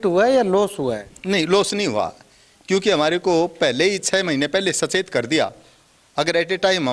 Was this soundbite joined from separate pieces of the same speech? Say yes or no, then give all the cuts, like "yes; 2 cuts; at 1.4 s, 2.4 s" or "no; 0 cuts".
no; 0 cuts